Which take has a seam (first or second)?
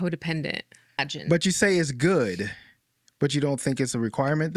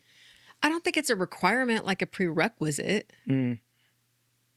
first